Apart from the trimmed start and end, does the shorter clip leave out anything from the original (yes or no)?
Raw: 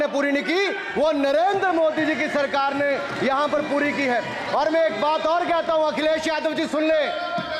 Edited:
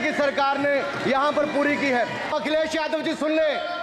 yes